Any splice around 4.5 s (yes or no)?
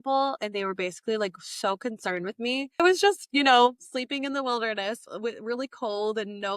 no